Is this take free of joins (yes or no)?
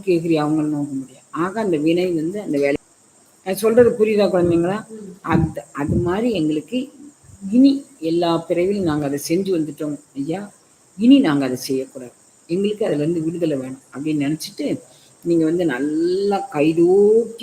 no